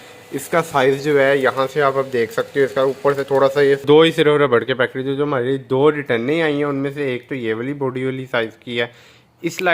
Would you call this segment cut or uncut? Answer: cut